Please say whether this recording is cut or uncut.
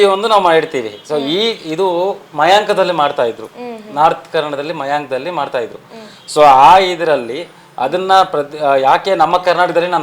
uncut